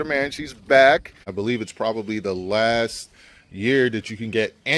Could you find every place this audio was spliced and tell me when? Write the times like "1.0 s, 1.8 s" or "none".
1.3 s